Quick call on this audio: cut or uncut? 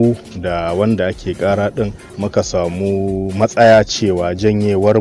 uncut